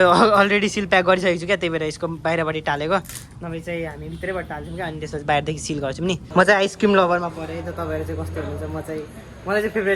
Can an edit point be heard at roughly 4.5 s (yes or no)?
no